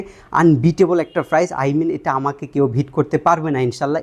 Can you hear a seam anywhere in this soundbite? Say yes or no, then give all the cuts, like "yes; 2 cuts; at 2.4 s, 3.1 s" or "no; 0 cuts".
no; 0 cuts